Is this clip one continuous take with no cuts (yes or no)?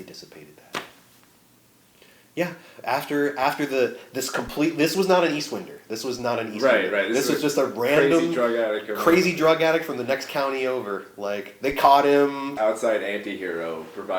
yes